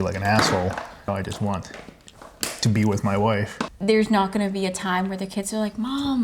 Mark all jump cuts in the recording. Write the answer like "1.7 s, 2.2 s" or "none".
1.1 s, 3.6 s